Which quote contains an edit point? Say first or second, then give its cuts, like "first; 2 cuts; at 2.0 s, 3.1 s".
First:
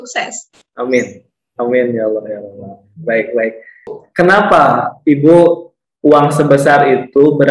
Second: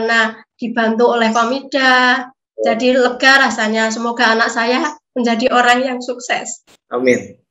first; 1 cut; at 4.0 s